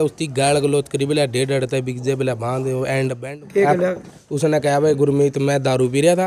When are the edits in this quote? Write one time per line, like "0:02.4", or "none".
0:03.2